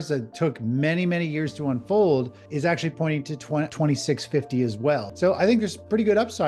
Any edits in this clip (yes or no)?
yes